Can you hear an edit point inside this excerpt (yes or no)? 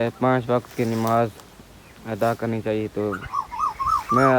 no